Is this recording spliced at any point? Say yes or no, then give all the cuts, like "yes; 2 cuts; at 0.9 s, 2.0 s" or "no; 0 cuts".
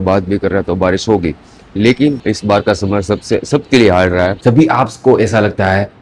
yes; 2 cuts; at 2.2 s, 4.4 s